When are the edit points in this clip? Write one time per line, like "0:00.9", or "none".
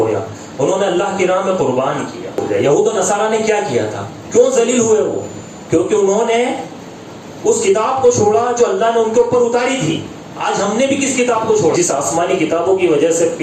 0:02.4
0:11.7